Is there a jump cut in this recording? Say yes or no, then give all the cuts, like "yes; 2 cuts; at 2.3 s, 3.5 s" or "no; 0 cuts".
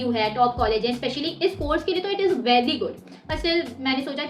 no; 0 cuts